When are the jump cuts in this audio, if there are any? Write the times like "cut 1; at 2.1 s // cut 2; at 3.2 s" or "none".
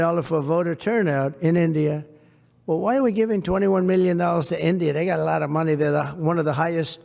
none